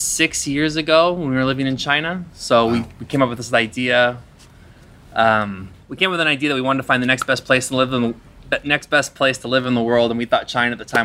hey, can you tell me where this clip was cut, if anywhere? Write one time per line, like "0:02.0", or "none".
none